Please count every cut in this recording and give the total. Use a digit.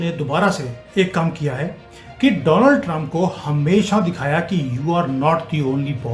0